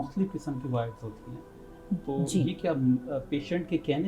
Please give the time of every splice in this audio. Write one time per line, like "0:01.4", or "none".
none